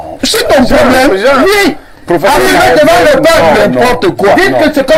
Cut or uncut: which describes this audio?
uncut